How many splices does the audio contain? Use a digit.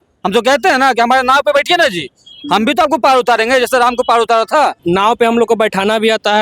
1